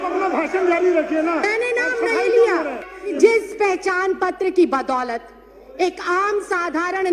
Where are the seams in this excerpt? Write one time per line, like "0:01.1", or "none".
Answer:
0:03.1

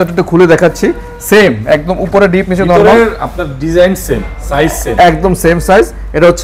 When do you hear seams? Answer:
none

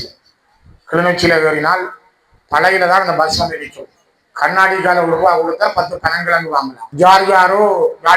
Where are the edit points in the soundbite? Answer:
0:06.8

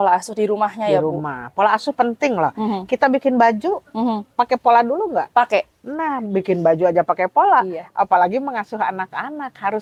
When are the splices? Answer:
none

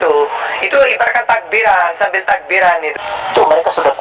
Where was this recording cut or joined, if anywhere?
0:02.9

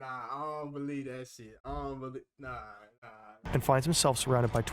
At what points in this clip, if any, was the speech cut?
0:03.3

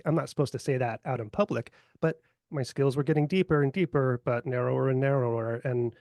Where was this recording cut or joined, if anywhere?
0:02.4

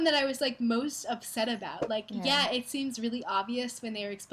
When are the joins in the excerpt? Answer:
none

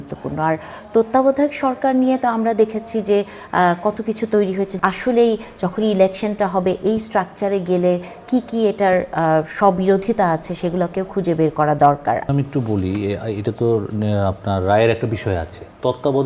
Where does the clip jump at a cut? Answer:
0:04.7
0:12.3

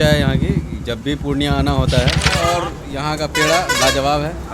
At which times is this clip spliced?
0:02.4

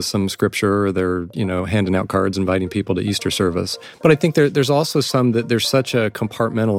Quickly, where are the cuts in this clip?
0:03.7

